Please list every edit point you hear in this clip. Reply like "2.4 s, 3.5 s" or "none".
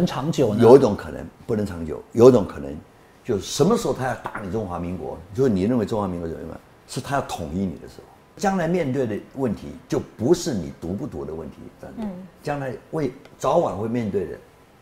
8.4 s